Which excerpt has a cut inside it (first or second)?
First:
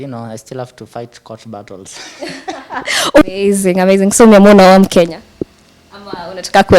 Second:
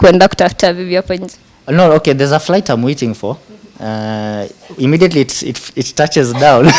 first